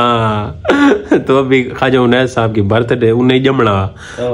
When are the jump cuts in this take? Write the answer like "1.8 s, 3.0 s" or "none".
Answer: none